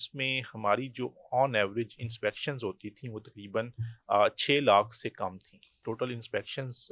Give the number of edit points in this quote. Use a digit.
1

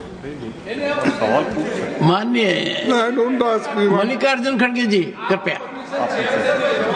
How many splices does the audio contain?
0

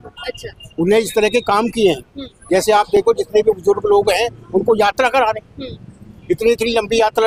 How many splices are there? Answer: 0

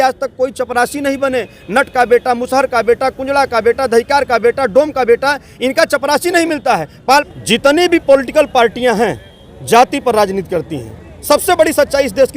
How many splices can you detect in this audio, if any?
1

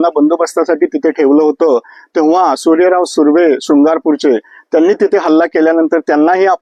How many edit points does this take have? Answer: 0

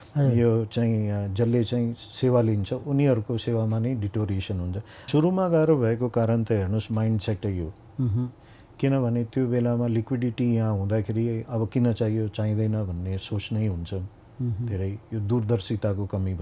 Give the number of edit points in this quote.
1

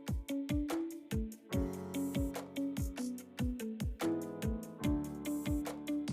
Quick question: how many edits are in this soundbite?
2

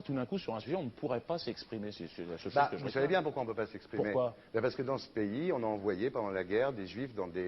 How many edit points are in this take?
1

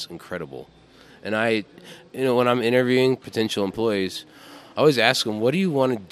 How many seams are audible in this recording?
1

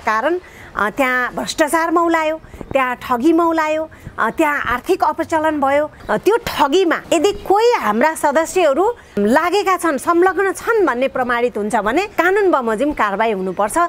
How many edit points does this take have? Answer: 4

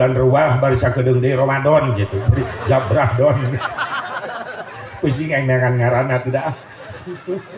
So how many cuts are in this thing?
0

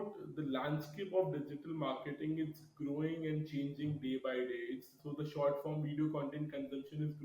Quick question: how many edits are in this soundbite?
1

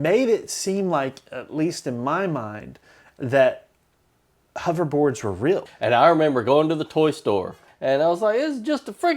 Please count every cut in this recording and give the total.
2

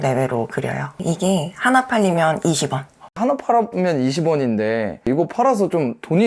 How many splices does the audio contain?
2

